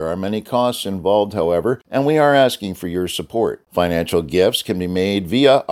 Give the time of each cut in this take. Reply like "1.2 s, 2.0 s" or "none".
1.8 s